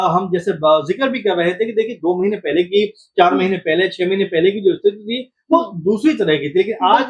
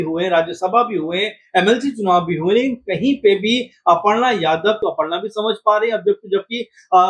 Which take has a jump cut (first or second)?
second